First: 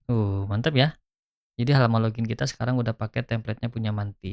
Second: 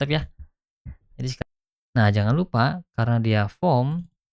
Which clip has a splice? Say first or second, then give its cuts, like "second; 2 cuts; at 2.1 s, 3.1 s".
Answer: second; 1 cut; at 1.4 s